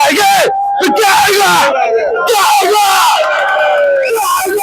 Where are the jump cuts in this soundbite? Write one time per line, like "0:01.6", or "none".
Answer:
none